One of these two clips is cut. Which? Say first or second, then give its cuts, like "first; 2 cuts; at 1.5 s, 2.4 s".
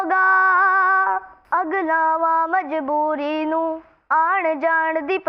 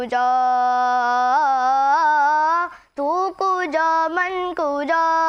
first; 1 cut; at 1.3 s